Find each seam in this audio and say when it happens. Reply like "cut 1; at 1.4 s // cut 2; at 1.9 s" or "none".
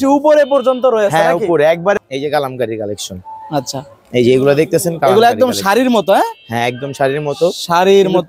cut 1; at 2.0 s